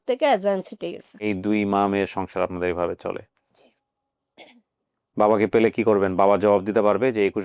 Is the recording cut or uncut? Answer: cut